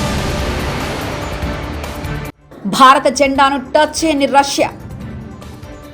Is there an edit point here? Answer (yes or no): yes